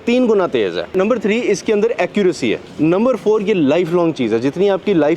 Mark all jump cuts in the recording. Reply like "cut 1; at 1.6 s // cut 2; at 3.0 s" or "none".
cut 1; at 1.0 s // cut 2; at 2.7 s